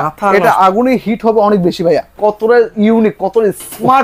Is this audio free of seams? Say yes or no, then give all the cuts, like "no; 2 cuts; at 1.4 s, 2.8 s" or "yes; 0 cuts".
no; 1 cut; at 2.1 s